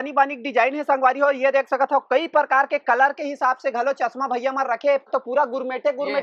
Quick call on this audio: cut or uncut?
cut